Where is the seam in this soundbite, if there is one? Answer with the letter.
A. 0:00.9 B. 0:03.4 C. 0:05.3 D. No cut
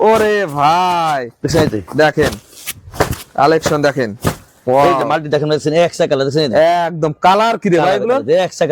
D